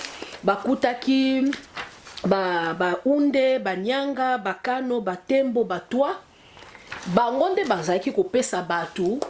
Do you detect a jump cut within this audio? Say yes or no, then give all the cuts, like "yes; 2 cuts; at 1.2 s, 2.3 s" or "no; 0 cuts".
no; 0 cuts